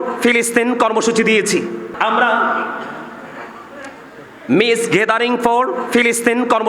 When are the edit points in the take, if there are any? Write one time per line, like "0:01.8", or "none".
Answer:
0:01.9